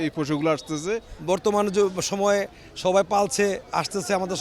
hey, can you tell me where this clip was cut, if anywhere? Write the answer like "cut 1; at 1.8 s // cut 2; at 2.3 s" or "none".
cut 1; at 1.1 s